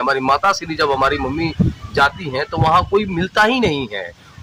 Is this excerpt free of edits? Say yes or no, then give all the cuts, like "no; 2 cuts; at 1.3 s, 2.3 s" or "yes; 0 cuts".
yes; 0 cuts